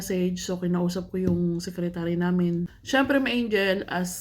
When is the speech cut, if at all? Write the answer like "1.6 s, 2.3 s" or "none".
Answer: 2.8 s